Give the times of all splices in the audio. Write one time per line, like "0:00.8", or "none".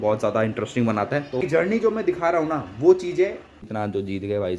0:01.4
0:03.6